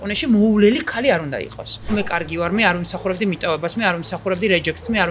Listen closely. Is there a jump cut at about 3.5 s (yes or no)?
no